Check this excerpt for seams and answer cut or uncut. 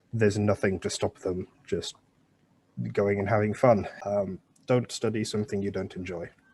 cut